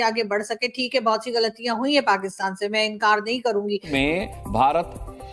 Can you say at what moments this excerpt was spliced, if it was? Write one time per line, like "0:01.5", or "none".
0:03.9